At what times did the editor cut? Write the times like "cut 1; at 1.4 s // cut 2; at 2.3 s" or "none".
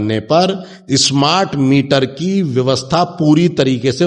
none